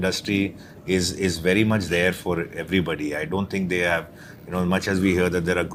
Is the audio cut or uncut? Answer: uncut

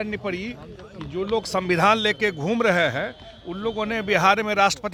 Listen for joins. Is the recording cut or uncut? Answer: uncut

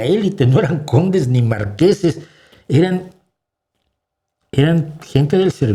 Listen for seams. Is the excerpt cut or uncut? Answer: uncut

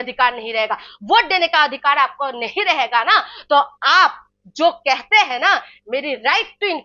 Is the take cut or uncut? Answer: uncut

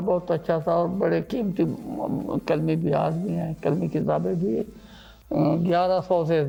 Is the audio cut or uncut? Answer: uncut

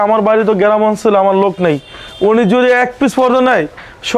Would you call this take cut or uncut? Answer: uncut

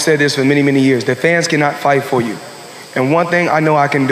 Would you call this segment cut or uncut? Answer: uncut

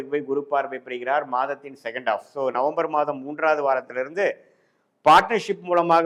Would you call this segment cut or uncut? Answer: uncut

